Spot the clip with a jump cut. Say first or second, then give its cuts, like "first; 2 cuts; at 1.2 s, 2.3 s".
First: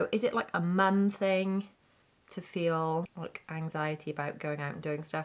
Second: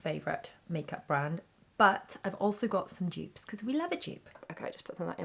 second; 1 cut; at 4.3 s